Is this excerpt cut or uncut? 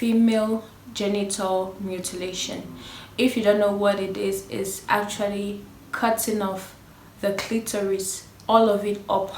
uncut